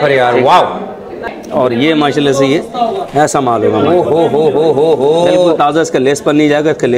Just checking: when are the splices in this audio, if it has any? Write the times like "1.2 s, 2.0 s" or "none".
1.3 s